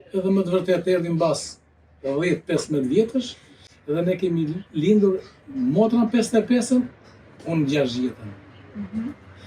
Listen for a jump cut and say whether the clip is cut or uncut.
uncut